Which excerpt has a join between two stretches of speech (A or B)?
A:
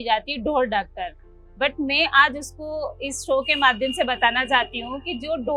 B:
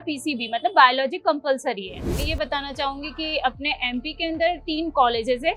B